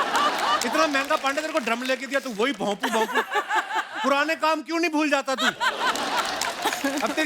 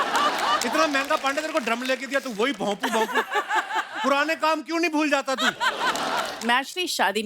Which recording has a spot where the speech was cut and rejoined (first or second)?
second